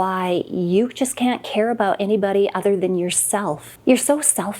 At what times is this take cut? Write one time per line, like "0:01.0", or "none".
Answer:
0:03.7